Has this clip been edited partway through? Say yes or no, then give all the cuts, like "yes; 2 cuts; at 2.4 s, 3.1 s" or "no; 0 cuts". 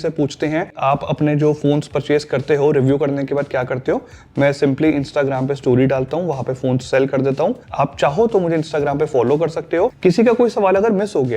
no; 0 cuts